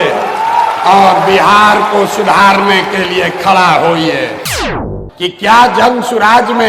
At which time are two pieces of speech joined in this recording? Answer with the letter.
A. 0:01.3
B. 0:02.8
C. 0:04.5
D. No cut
C